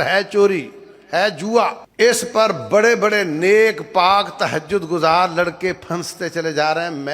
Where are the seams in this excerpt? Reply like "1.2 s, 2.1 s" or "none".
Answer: 1.8 s

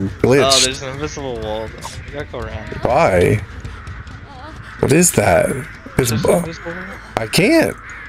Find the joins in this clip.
none

